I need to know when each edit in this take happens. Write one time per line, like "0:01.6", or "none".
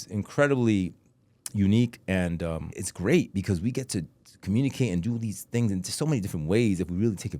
0:02.7